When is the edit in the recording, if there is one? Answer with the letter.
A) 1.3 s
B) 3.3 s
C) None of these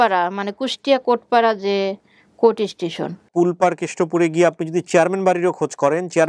B